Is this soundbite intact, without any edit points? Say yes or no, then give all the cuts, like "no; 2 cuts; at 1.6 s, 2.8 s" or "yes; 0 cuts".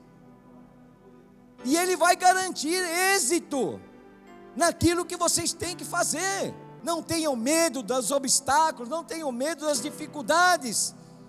no; 1 cut; at 6.7 s